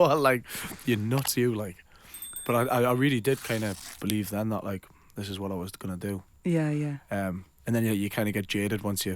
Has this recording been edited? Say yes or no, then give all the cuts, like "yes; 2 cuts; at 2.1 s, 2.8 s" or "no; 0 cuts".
no; 0 cuts